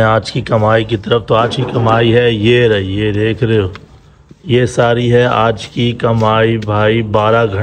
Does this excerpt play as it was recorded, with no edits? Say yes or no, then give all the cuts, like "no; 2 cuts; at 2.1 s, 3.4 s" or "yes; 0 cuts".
yes; 0 cuts